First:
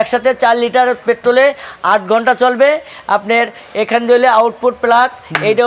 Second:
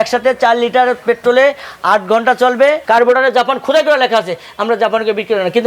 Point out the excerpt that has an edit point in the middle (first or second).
second